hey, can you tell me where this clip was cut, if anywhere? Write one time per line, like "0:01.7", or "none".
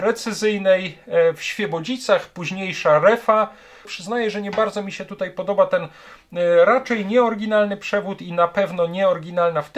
0:03.9